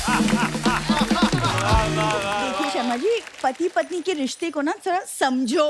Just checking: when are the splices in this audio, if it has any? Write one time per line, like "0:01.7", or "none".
0:02.6